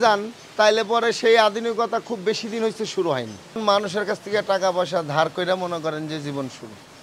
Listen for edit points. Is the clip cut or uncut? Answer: cut